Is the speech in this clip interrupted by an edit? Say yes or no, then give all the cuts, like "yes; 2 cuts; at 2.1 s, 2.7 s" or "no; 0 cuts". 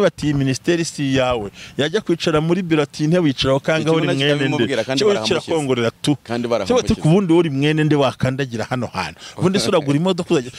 no; 0 cuts